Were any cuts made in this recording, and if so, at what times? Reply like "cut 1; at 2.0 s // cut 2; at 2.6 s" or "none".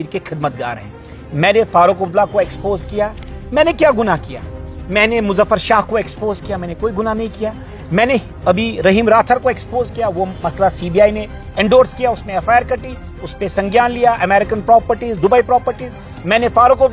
none